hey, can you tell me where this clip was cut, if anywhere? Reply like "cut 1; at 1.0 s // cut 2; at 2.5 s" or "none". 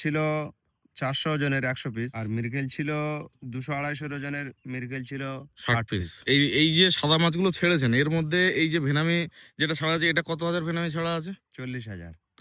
cut 1; at 2.2 s // cut 2; at 6.2 s